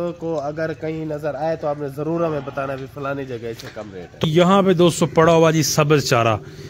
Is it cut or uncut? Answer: cut